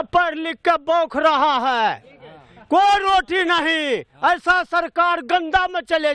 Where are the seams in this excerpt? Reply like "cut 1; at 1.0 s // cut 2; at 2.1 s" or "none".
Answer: none